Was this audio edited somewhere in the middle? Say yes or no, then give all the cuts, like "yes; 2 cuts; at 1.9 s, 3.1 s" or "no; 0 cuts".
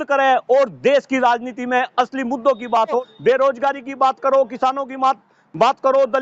yes; 1 cut; at 2.9 s